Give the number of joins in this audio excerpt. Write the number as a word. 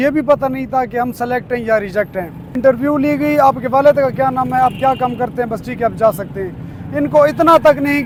zero